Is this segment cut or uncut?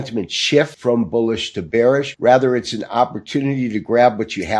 cut